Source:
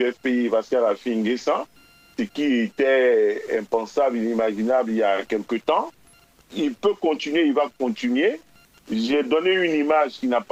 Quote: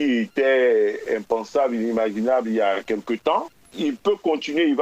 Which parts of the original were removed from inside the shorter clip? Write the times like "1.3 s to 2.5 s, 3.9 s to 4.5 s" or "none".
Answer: 6.0 s to 6.4 s